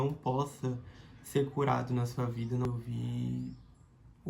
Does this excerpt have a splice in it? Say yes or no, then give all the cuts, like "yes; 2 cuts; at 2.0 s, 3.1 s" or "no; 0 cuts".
yes; 1 cut; at 2.6 s